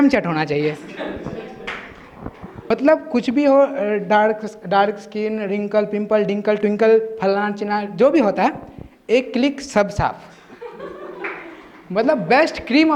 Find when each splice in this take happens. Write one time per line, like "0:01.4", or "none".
0:02.7